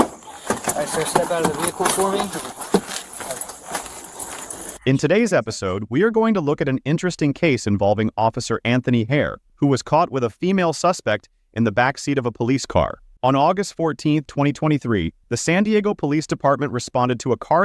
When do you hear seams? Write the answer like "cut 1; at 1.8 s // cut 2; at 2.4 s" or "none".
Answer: cut 1; at 3.5 s // cut 2; at 4.8 s